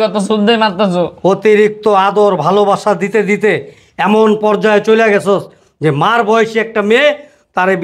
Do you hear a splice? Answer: no; 0 cuts

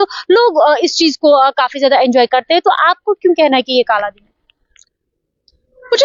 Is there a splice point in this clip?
no; 0 cuts

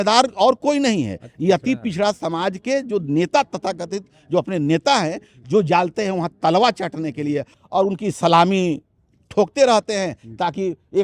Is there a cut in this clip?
yes; 1 cut; at 7.5 s

